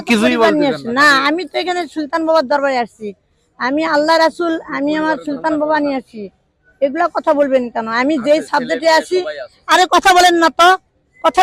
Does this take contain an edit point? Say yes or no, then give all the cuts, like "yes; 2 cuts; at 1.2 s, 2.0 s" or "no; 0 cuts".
no; 0 cuts